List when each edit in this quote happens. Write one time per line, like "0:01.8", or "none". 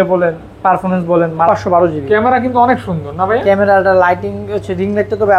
0:01.5